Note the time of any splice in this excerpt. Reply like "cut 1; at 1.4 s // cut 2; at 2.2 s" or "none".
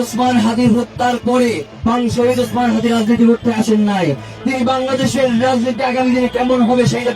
none